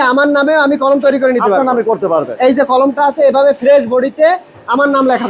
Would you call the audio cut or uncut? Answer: uncut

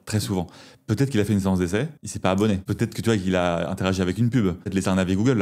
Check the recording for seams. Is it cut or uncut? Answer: cut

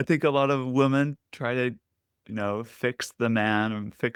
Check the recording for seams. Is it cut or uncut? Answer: uncut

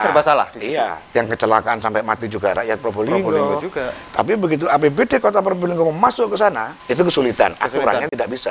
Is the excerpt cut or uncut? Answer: cut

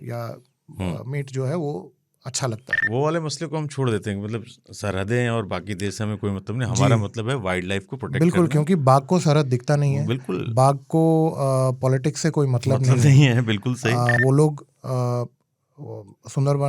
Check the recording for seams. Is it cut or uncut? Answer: cut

